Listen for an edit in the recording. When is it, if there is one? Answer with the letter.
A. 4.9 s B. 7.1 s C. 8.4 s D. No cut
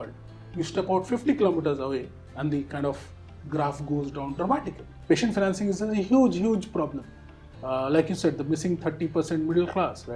A